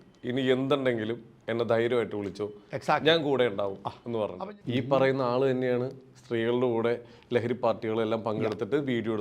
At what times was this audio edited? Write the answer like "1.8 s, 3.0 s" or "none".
4.4 s